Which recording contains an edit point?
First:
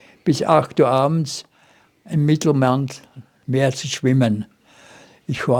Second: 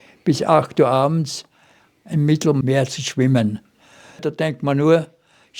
second; 2 cuts; at 2.6 s, 4.2 s

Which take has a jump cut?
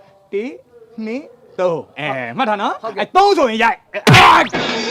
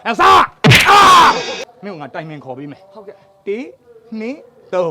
second; 1 cut; at 1.7 s

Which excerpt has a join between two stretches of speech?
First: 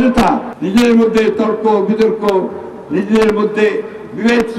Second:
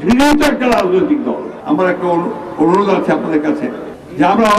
second; 1 cut; at 1.5 s

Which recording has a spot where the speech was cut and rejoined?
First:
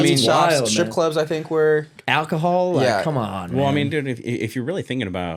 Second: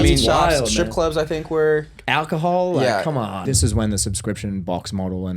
second; 1 cut; at 3.4 s

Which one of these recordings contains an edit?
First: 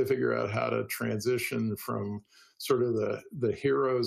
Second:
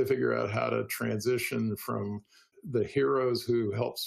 second; 1 cut; at 2.6 s

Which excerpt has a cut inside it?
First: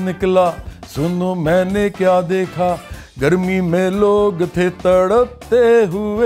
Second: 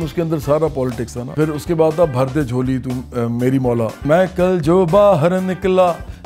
second; 2 cuts; at 1.3 s, 4.0 s

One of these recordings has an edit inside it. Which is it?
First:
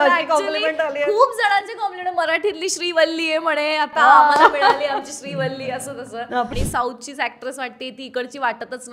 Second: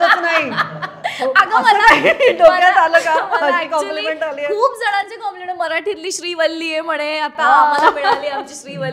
first; 1 cut; at 6.5 s

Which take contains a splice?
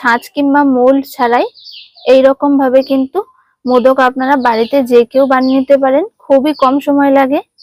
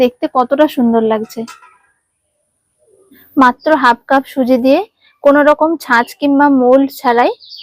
second; 1 cut; at 3.1 s

